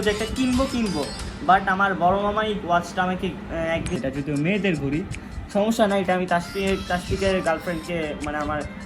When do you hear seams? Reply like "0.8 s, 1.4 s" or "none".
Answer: 4.0 s